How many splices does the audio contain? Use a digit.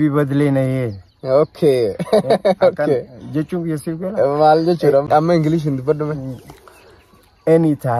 1